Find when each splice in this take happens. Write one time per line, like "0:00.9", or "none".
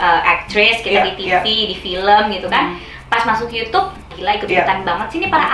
0:04.1